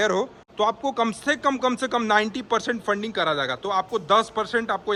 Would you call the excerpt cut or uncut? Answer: uncut